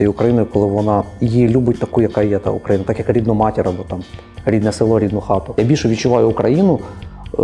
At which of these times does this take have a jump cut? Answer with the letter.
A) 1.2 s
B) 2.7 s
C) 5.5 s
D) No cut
C